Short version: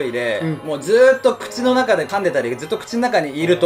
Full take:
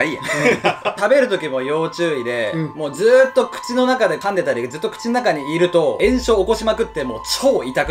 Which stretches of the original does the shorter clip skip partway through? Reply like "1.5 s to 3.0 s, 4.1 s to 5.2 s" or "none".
none